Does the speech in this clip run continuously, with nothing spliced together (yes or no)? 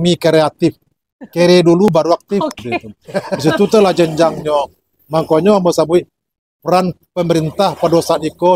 no